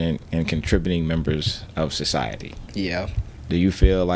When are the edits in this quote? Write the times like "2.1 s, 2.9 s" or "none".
3.2 s